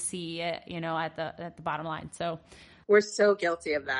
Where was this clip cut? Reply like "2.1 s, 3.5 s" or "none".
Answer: 2.9 s